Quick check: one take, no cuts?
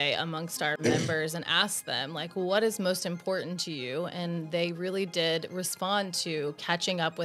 yes; 0 cuts

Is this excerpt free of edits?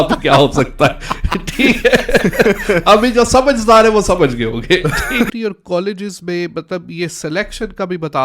no; 1 cut; at 5.3 s

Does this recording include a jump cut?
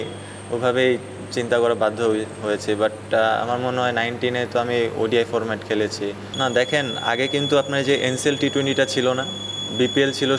yes; 1 cut; at 6.2 s

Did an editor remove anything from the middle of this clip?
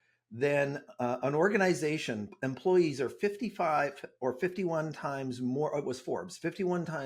no; 0 cuts

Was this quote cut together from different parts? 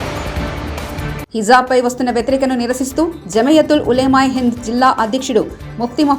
yes; 1 cut; at 0.9 s

